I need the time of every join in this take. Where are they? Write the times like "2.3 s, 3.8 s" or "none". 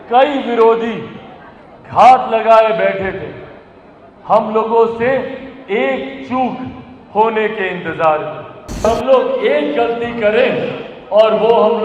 8.9 s